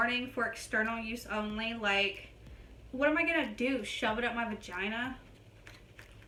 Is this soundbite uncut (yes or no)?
yes